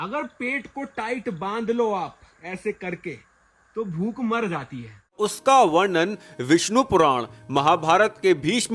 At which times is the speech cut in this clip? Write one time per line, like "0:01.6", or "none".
0:05.1